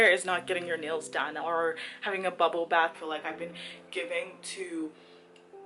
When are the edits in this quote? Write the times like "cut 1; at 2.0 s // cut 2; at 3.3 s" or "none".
cut 1; at 2.9 s